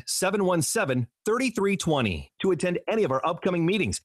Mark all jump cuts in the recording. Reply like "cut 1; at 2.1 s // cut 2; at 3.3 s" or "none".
none